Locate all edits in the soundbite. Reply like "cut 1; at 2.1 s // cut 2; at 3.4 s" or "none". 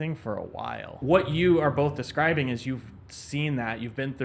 cut 1; at 0.9 s